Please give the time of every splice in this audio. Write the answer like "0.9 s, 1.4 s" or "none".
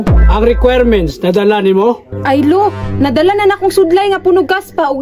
none